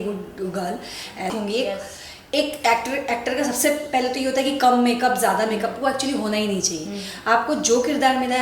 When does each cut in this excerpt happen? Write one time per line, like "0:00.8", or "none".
0:01.3

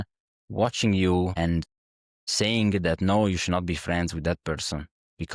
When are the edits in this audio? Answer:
0:01.6

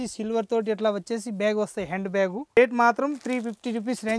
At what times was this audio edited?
0:02.6

